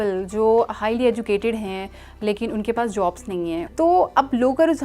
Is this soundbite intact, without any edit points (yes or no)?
no